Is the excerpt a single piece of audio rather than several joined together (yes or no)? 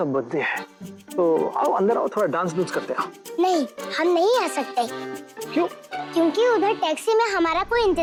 yes